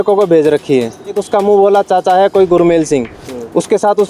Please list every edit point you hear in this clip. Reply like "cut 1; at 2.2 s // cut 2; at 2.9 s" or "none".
cut 1; at 1.2 s

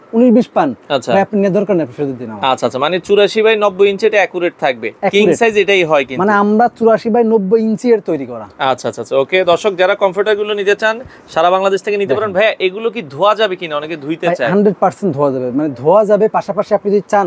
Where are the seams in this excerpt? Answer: none

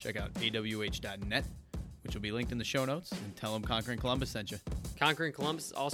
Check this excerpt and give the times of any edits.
cut 1; at 4.8 s

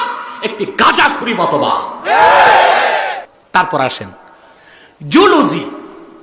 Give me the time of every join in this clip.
cut 1; at 3.3 s

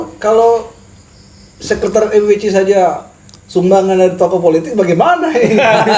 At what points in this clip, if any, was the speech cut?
none

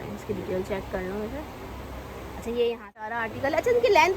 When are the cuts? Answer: cut 1; at 3.2 s

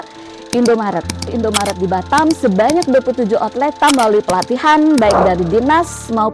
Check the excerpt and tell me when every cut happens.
cut 1; at 1.3 s // cut 2; at 3.7 s

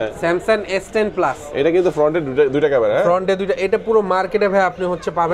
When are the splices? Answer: none

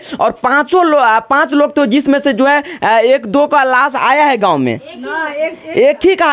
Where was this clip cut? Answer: none

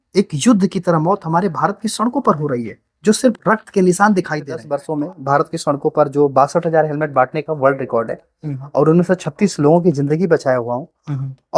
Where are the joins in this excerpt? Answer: cut 1; at 4.8 s

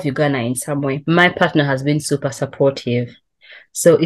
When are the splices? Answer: cut 1; at 1.0 s

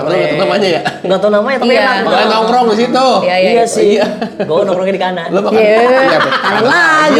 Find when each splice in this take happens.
none

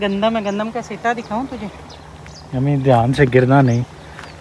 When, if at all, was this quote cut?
none

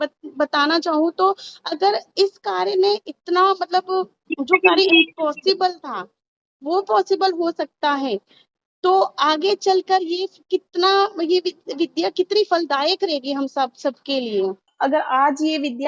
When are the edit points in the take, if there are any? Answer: cut 1; at 14.7 s

